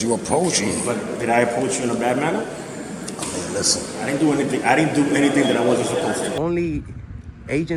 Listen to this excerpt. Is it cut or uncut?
cut